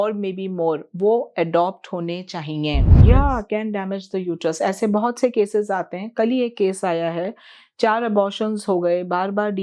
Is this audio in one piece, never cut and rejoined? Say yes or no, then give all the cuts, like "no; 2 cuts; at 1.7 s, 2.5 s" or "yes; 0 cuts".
no; 1 cut; at 3.0 s